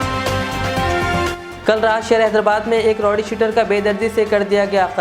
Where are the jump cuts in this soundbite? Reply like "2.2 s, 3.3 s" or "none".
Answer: 1.4 s

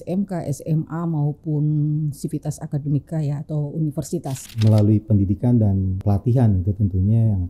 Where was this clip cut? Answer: 4.4 s, 6.0 s

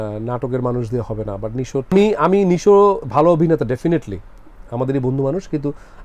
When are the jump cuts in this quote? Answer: 1.9 s

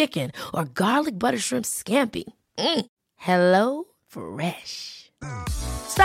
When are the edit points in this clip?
none

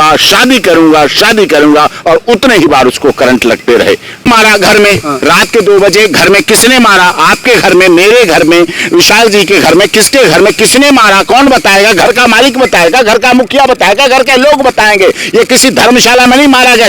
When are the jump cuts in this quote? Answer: 4.3 s

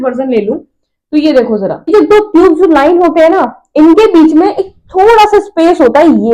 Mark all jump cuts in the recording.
1.9 s

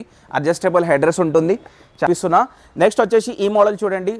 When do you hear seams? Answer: 2.1 s

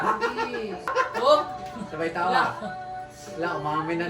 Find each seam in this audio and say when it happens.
0.9 s

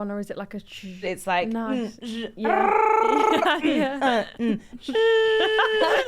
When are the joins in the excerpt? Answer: 1.0 s

